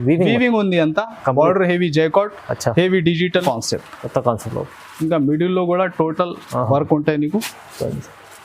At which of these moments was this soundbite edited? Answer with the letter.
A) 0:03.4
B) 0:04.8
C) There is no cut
A